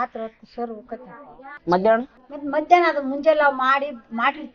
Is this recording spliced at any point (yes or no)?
no